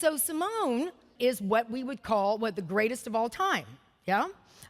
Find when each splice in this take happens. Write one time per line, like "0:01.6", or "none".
0:01.1